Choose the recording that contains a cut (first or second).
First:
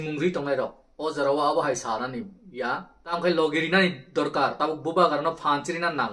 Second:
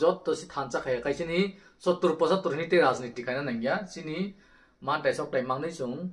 first